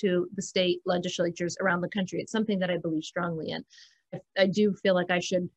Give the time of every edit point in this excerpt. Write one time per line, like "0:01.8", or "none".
0:04.2